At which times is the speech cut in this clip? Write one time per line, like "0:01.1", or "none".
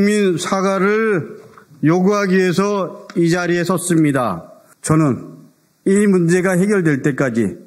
0:04.7